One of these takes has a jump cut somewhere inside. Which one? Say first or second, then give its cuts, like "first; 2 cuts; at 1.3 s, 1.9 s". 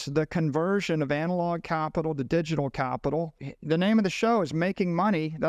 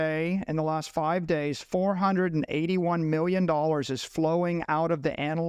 first; 1 cut; at 3.5 s